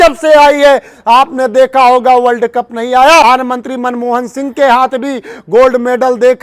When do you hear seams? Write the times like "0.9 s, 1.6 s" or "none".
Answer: none